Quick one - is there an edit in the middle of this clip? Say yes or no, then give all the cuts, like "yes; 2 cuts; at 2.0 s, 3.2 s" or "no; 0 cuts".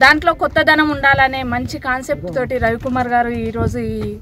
no; 0 cuts